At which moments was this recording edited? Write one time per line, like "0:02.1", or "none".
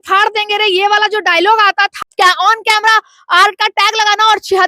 0:02.1